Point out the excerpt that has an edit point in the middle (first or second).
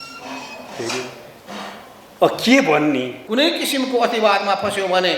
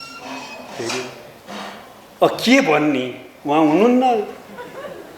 first